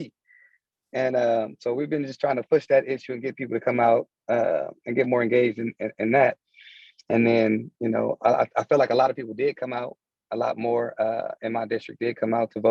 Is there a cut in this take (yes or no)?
no